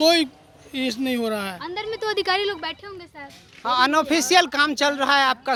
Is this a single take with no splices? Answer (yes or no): yes